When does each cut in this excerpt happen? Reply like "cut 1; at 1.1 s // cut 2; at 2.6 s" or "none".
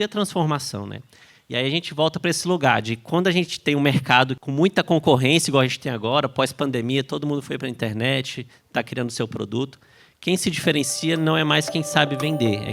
cut 1; at 4.4 s